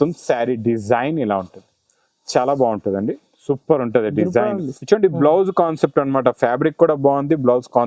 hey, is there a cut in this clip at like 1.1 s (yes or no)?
no